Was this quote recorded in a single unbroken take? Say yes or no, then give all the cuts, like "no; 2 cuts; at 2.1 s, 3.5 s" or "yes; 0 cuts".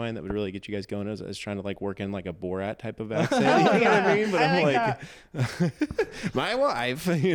yes; 0 cuts